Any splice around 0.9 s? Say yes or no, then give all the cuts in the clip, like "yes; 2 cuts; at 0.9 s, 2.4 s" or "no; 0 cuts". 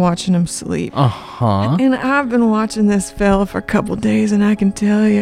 yes; 1 cut; at 0.9 s